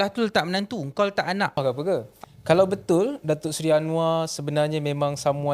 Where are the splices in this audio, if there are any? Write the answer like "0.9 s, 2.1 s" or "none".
1.9 s